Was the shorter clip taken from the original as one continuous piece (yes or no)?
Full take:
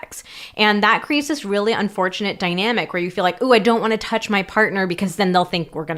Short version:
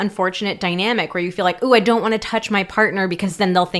yes